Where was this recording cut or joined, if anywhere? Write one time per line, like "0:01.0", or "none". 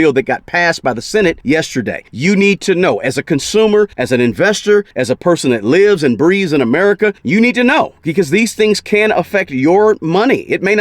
0:01.7
0:04.0
0:04.9
0:07.2